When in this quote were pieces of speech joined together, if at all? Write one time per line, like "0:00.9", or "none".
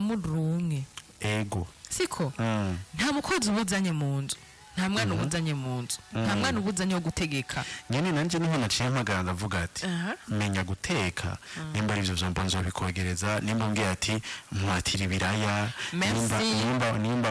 none